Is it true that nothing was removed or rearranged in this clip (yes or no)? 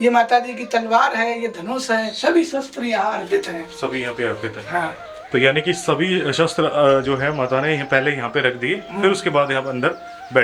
yes